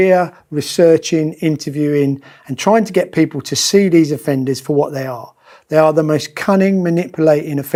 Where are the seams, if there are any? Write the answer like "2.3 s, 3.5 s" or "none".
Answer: none